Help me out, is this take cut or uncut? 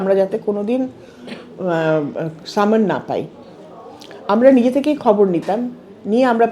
uncut